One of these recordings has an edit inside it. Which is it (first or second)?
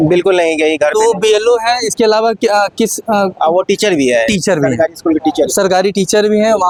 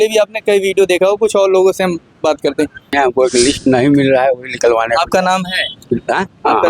second